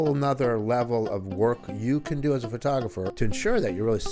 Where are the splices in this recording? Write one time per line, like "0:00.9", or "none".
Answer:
0:03.1